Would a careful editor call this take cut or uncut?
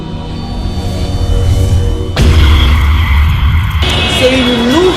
uncut